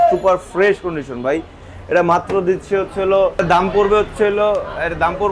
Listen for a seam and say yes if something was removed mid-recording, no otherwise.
no